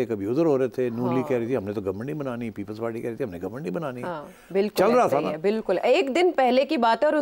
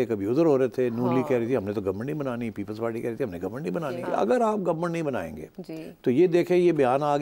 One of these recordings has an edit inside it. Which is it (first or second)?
second